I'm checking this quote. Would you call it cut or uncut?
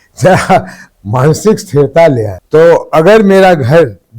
cut